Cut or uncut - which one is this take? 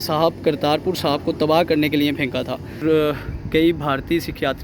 cut